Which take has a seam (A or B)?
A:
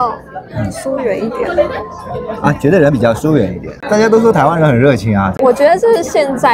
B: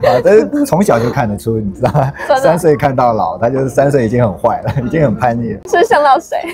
A